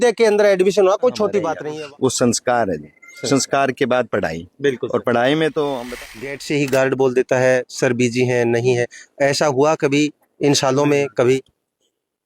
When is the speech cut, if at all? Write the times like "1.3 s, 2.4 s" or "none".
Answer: 1.6 s, 5.8 s